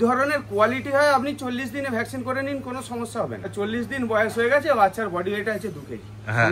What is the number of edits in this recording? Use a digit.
1